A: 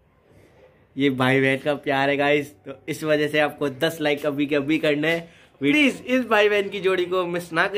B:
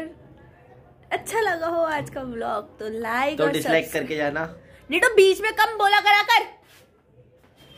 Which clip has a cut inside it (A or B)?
A